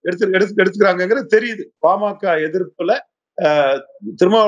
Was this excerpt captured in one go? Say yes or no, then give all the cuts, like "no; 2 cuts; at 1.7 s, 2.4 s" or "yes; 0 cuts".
no; 1 cut; at 1.6 s